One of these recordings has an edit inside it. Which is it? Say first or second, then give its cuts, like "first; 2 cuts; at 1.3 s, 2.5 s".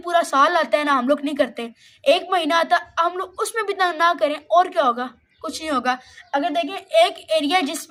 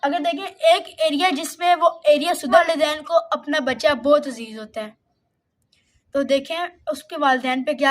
second; 1 cut; at 2.6 s